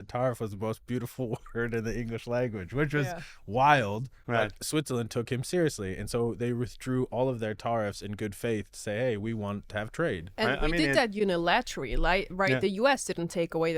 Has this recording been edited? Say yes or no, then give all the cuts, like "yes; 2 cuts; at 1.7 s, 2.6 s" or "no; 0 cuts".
no; 0 cuts